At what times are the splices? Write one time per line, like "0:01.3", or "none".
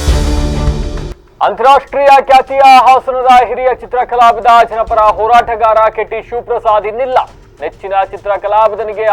0:01.1